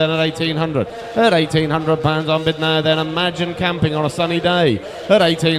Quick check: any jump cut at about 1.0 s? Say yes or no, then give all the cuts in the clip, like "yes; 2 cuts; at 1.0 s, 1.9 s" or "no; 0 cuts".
yes; 1 cut; at 1.0 s